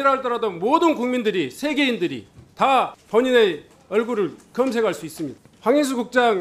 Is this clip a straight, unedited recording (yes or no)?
no